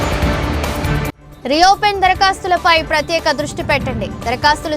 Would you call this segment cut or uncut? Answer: cut